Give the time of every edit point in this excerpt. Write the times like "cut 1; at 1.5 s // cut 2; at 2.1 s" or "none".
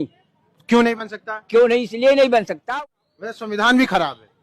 cut 1; at 2.6 s